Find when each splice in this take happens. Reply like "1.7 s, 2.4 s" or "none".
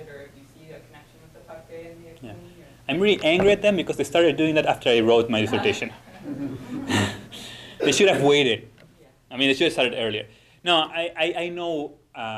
8.1 s